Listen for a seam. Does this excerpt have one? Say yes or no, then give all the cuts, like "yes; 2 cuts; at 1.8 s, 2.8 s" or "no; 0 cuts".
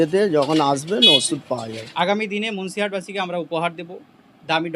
yes; 1 cut; at 1.8 s